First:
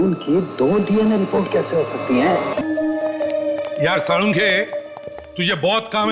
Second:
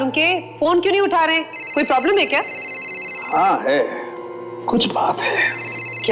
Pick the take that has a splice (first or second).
first